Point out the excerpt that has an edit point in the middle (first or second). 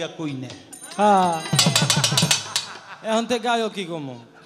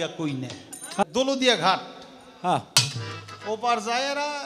second